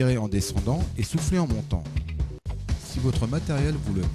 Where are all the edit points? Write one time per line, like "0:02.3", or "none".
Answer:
0:02.4